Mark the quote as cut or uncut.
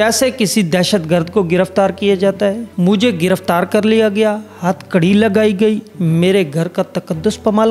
cut